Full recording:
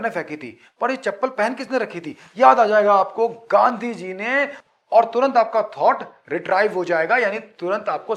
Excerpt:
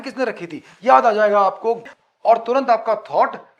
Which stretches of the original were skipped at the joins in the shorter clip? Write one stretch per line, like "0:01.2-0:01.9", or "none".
0:03.4-0:04.5

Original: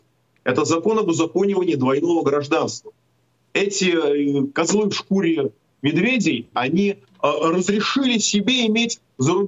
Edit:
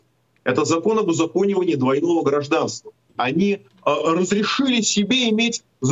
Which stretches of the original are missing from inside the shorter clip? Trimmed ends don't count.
0:03.1-0:06.5

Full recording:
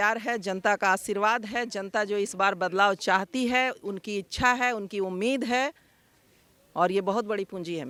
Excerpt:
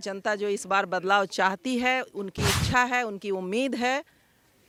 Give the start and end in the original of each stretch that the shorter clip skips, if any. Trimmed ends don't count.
none

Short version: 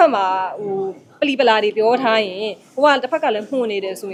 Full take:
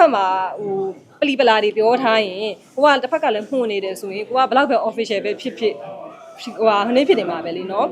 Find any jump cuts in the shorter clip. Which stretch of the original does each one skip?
none

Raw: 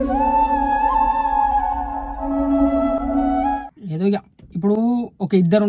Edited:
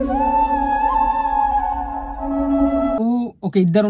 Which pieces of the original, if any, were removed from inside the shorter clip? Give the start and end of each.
0:03.0-0:04.8

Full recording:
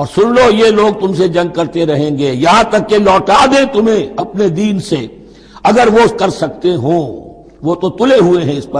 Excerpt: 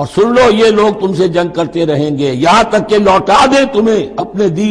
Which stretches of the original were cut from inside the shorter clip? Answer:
none

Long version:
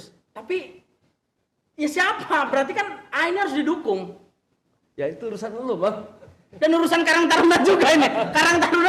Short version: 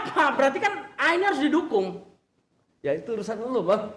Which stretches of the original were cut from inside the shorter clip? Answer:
none

